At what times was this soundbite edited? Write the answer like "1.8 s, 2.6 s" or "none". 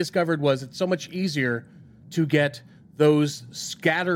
none